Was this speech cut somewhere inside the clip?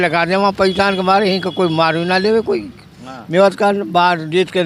no; 0 cuts

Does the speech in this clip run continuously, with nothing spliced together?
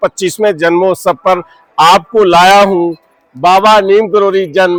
yes; 0 cuts

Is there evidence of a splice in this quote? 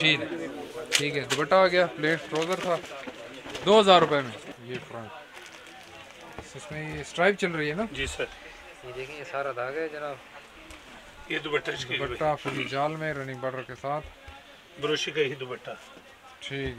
yes; 1 cut; at 4.4 s

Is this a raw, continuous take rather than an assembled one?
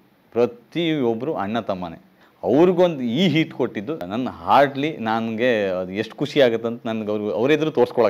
no; 1 cut; at 4.1 s

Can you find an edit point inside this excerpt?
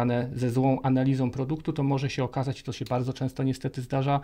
no; 0 cuts

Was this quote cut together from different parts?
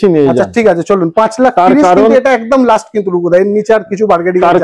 no; 0 cuts

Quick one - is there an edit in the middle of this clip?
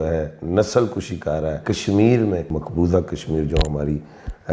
yes; 2 cuts; at 1.6 s, 2.6 s

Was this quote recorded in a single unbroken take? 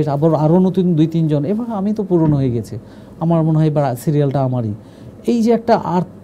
yes; 0 cuts

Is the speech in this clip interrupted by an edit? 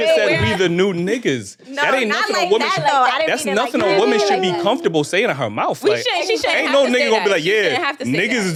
no; 0 cuts

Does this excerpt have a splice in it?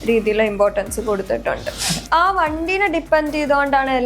yes; 1 cut; at 2.0 s

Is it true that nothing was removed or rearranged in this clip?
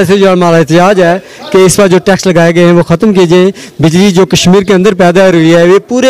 yes; 0 cuts

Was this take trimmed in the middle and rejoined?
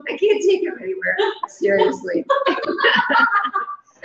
no; 0 cuts

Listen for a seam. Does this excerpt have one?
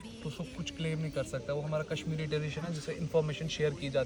no; 0 cuts

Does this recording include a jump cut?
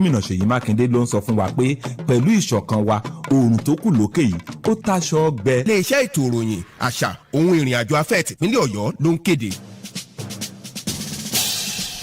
yes; 1 cut; at 9.6 s

